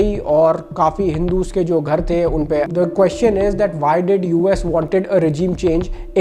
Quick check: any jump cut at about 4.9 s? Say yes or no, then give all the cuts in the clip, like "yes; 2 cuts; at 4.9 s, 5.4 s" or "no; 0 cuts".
no; 1 cut; at 2.7 s